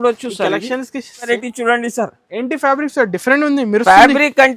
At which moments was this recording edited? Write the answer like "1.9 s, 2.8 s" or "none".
1.3 s